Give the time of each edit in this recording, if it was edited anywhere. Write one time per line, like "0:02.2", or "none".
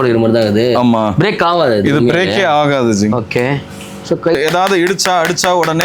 0:04.3